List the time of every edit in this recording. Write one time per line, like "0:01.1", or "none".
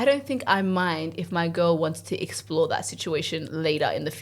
none